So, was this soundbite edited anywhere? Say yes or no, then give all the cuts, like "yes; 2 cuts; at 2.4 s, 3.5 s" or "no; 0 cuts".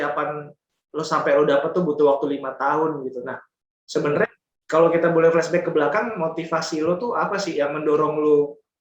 no; 0 cuts